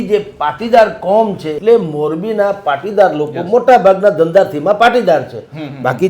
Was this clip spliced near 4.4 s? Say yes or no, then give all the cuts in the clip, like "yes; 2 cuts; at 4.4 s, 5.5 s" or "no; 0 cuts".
no; 1 cut; at 1.6 s